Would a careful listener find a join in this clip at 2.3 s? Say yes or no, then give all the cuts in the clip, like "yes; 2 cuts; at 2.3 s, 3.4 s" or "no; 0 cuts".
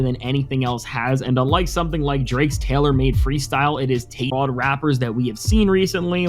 no; 1 cut; at 4.3 s